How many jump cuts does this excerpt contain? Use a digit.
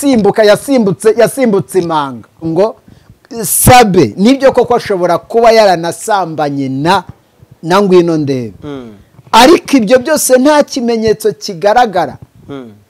1